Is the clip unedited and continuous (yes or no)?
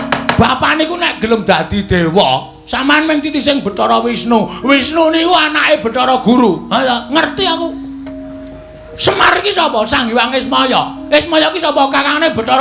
yes